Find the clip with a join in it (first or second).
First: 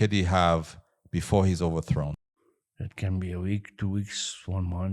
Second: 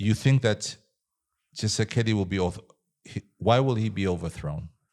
first